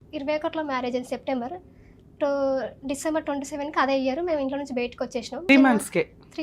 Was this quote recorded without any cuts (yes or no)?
no